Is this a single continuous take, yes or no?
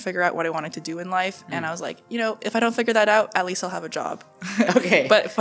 yes